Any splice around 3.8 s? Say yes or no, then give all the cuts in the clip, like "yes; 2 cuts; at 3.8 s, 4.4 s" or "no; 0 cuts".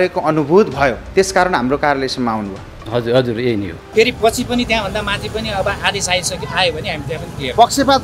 yes; 2 cuts; at 1.0 s, 3.8 s